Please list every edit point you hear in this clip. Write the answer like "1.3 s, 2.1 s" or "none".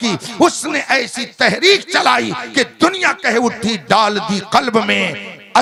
none